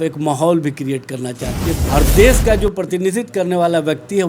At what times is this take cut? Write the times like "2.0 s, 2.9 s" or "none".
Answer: 1.7 s